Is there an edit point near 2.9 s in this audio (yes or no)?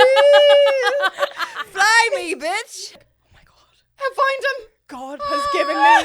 yes